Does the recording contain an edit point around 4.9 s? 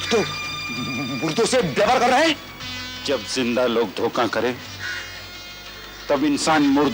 no; 1 cut; at 2.5 s

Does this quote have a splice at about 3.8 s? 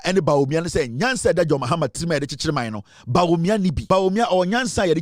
yes; 1 cut; at 3.8 s

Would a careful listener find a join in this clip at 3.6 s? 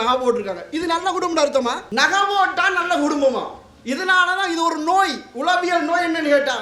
no; 1 cut; at 1.8 s

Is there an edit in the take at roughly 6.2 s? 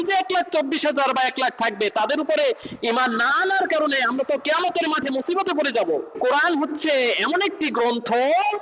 yes; 1 cut; at 6.2 s

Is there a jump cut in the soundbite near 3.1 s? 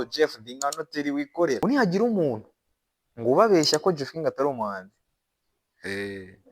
no; 1 cut; at 1.6 s

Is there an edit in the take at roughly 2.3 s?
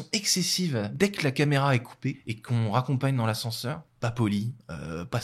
yes; 3 cuts; at 0.9 s, 2.3 s, 3.9 s

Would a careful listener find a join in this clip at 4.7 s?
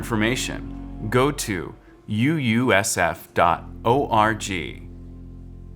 yes; 1 cut; at 4.7 s

